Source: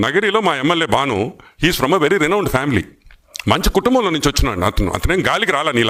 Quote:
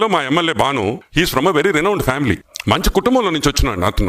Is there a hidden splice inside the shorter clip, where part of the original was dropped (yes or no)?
yes